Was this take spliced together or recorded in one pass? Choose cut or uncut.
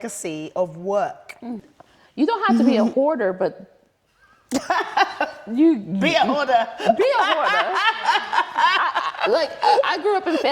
cut